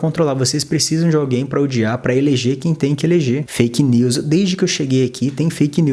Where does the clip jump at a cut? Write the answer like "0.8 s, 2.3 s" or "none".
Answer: none